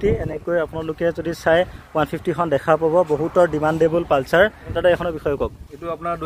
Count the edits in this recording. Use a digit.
1